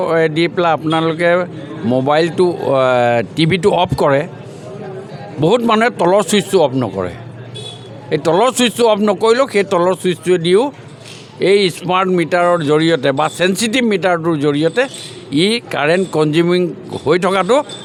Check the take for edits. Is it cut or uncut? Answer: uncut